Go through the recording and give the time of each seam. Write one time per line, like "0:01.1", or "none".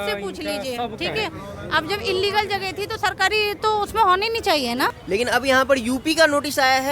0:05.0